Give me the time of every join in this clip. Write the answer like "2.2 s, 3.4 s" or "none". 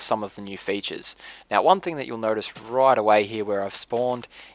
1.0 s

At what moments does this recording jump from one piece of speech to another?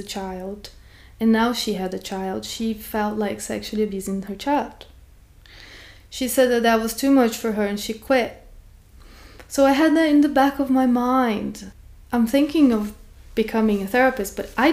11.6 s

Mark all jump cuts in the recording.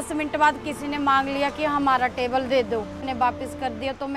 3.0 s

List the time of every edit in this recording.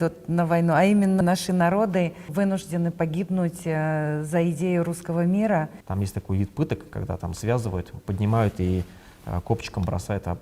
1.2 s, 2.3 s, 5.8 s

